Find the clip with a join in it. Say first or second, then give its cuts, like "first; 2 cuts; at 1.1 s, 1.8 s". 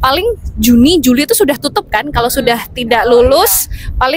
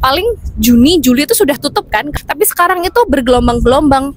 second; 1 cut; at 2.1 s